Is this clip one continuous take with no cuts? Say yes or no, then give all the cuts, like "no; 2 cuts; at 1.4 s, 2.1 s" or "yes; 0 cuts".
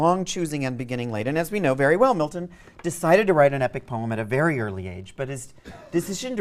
yes; 0 cuts